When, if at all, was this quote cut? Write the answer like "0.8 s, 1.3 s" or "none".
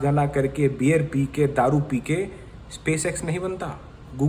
none